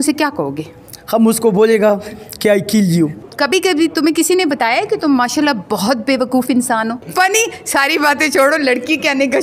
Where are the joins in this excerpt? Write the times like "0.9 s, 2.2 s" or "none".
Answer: 3.3 s, 7.0 s